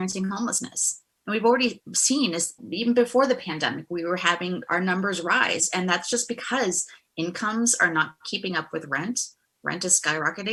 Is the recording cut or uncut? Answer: uncut